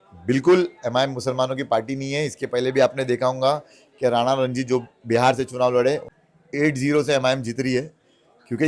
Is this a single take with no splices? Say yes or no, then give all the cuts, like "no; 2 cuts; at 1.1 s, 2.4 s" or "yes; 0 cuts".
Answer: no; 1 cut; at 6.1 s